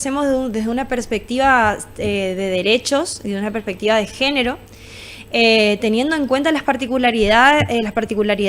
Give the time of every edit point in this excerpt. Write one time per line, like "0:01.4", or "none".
none